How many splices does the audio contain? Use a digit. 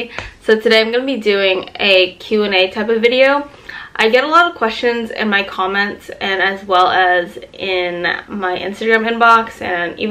0